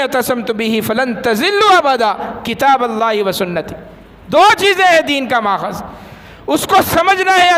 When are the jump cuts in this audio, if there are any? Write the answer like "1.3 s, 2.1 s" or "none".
none